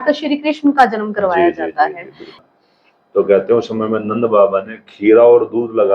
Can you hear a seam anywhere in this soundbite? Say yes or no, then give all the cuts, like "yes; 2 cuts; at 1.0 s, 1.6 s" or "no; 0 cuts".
yes; 1 cut; at 2.4 s